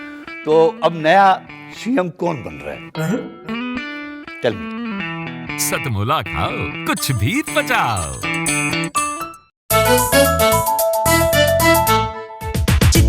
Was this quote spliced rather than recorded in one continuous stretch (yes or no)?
yes